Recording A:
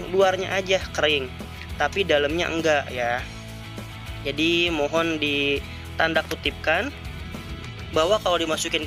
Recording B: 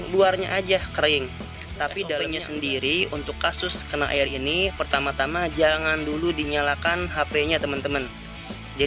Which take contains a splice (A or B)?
B